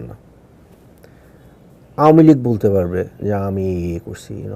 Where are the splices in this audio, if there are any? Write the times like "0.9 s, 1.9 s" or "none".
1.2 s

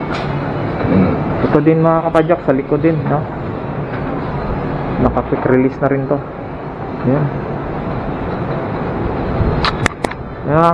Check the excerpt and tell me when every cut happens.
none

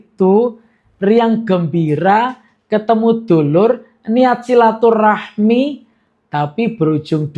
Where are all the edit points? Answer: none

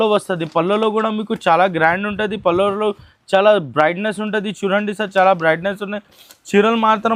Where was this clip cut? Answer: none

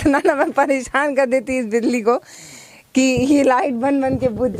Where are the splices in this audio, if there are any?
none

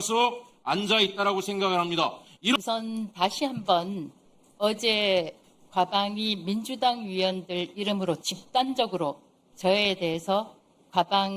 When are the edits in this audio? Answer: 2.5 s

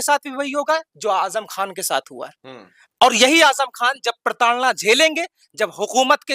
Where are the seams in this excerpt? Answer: none

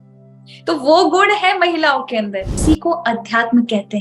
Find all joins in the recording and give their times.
2.6 s

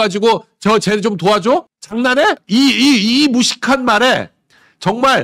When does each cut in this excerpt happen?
2.4 s

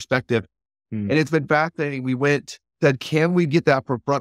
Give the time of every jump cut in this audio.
2.6 s

